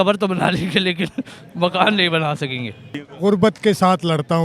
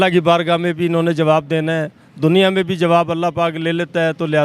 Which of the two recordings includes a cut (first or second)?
first